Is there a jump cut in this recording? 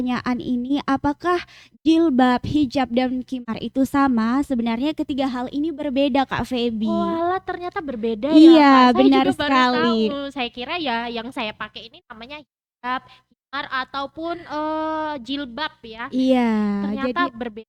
no; 0 cuts

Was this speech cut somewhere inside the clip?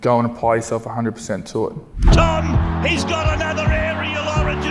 yes; 1 cut; at 1.9 s

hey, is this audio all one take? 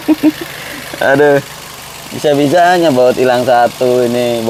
yes; 0 cuts

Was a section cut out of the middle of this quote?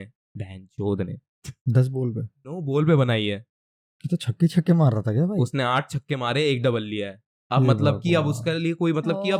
no; 0 cuts

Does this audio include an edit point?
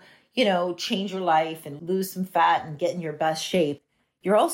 no; 0 cuts

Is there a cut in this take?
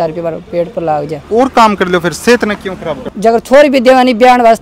yes; 2 cuts; at 1.2 s, 2.9 s

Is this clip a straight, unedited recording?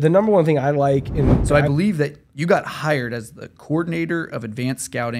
no; 1 cut; at 1.4 s

